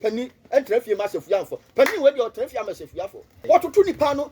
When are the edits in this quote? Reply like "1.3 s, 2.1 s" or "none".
3.2 s

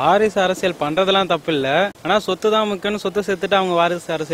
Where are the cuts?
2.0 s

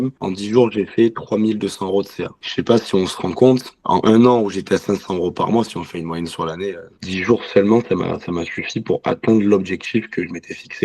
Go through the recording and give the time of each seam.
6.9 s

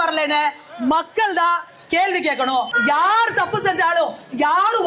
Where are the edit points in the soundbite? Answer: 2.7 s

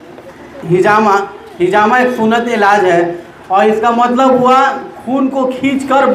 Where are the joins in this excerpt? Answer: none

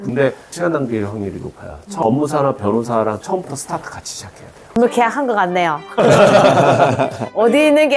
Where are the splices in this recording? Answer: 1.9 s, 4.6 s

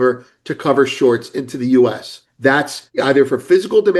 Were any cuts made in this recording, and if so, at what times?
2.5 s

